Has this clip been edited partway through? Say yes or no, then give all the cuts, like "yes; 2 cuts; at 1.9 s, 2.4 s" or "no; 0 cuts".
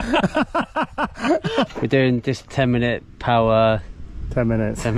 yes; 1 cut; at 1.7 s